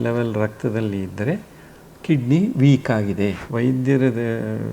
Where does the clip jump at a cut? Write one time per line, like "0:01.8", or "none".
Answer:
0:03.4